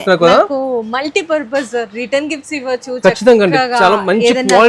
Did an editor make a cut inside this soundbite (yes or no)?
no